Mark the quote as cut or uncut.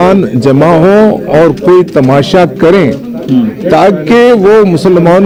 uncut